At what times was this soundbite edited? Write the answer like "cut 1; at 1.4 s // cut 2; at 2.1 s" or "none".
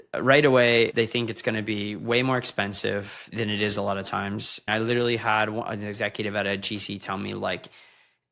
cut 1; at 0.9 s // cut 2; at 3.3 s // cut 3; at 4.7 s